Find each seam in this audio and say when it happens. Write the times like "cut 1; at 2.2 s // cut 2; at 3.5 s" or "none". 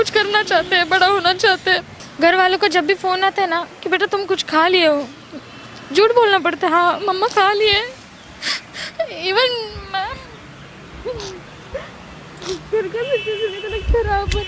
cut 1; at 1.9 s